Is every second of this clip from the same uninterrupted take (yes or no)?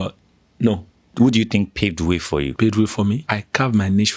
no